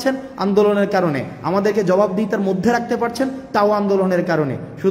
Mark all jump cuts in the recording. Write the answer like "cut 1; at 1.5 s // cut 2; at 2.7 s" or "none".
none